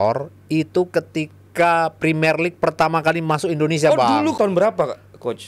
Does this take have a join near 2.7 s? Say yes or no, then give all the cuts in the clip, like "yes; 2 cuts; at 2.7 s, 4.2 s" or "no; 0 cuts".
no; 1 cut; at 4.3 s